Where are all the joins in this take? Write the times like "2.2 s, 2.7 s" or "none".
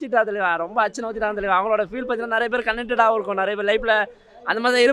none